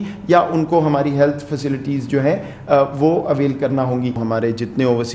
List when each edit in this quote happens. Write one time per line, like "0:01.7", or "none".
0:04.2